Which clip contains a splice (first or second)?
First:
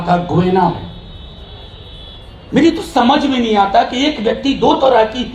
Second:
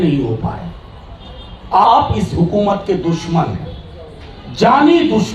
second